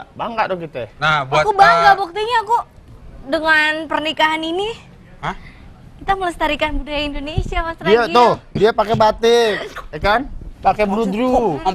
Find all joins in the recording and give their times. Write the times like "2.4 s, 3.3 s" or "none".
none